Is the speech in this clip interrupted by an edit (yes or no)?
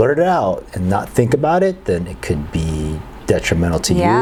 no